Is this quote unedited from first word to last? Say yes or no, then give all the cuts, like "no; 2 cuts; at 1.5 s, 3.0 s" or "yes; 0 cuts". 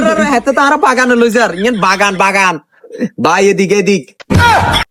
yes; 0 cuts